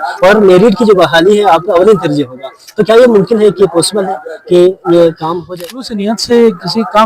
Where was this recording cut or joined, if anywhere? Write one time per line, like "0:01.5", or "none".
0:05.4